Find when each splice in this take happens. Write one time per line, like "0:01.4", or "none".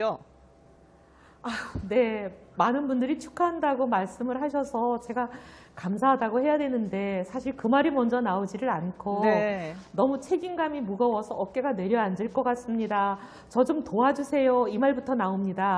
none